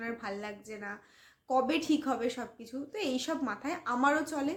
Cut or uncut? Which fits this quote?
uncut